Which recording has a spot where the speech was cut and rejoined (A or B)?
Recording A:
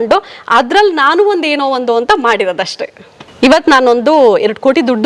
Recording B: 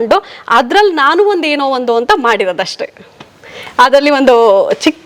A